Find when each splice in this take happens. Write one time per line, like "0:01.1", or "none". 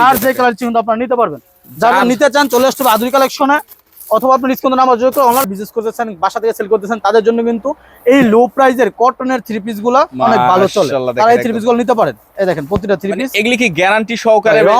0:05.5